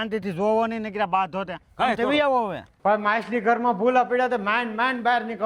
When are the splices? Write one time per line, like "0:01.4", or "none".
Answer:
0:02.6